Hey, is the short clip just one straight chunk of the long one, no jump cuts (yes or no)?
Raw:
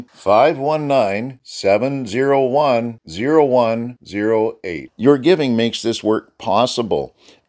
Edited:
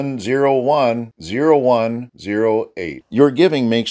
yes